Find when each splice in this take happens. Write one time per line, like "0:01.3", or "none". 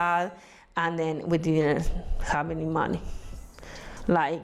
none